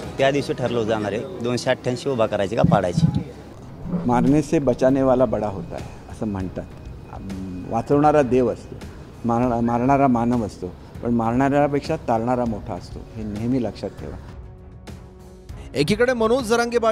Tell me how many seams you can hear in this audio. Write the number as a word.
zero